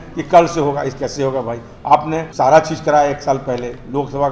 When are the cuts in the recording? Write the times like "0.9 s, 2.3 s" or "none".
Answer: 2.3 s